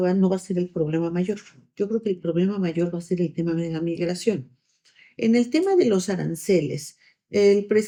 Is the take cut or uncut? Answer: uncut